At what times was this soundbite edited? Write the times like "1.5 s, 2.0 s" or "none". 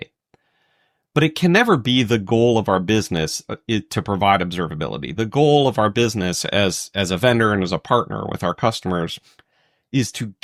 none